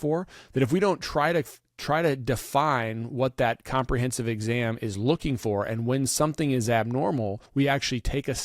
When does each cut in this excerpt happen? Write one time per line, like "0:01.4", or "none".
0:07.4